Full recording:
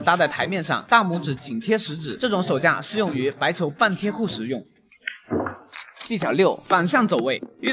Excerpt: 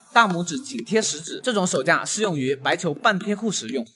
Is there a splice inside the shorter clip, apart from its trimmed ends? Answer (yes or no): no